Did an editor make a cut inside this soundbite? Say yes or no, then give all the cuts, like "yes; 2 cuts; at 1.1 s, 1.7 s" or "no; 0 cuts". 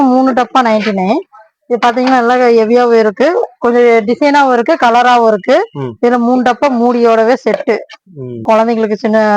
yes; 1 cut; at 8.4 s